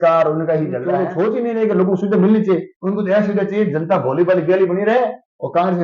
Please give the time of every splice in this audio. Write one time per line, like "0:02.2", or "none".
0:01.0